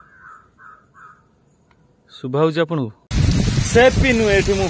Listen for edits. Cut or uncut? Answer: cut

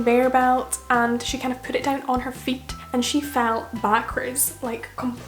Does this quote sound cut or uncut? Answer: cut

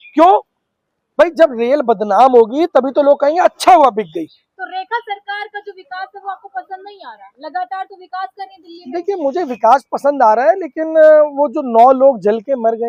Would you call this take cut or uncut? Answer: uncut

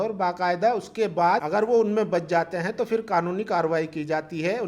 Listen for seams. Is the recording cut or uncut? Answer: cut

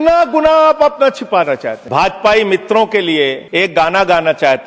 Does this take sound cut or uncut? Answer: cut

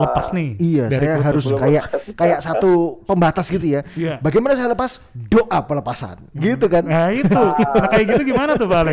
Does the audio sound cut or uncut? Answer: uncut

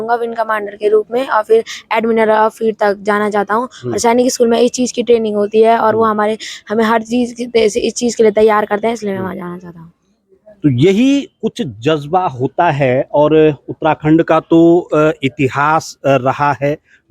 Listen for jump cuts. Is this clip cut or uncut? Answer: uncut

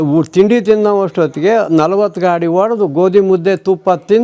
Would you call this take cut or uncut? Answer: uncut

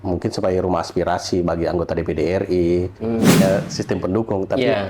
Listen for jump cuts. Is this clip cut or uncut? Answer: cut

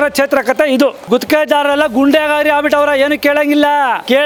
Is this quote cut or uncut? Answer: uncut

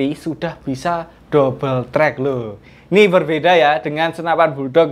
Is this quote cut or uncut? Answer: uncut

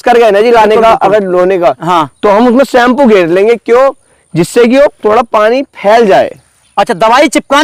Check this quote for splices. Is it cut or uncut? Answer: uncut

